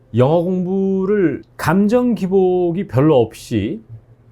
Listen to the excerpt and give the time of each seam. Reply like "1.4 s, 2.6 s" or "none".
1.5 s